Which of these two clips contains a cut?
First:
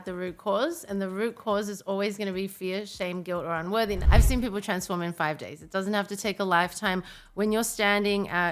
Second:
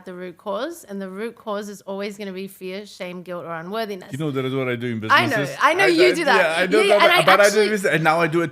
first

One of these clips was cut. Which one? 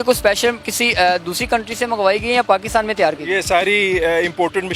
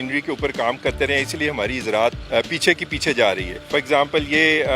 second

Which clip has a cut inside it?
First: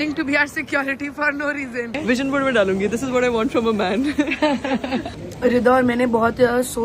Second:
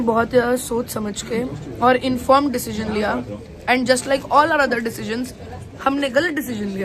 first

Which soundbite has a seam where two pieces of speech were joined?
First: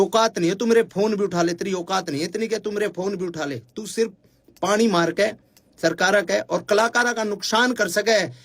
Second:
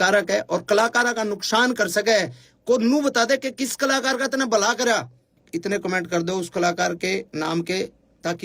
second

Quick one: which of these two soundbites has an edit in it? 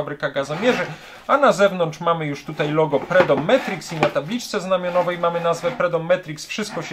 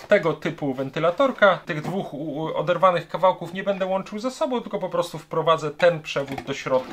second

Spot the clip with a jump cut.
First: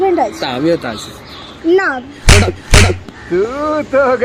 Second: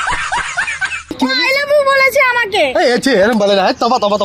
second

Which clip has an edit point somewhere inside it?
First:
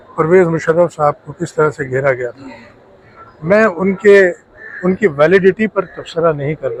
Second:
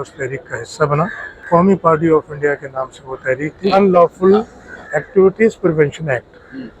second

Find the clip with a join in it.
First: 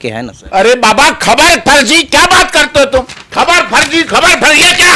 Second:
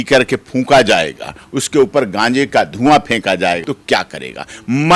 second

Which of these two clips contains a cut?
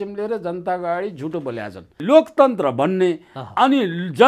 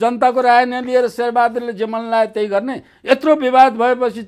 first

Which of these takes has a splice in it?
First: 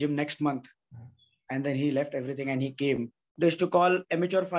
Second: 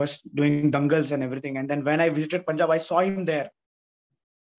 first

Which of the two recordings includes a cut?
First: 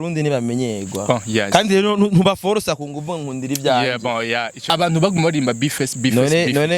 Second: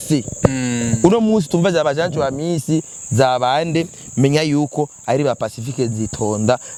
first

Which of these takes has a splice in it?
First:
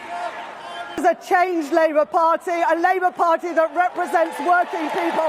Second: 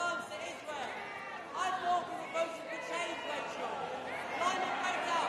first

